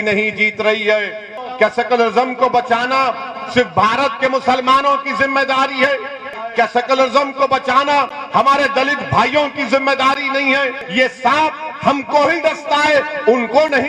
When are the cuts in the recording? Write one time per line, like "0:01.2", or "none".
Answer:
0:01.4
0:06.3
0:10.8